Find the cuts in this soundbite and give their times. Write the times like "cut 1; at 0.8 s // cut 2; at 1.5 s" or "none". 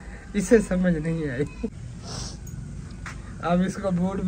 cut 1; at 1.8 s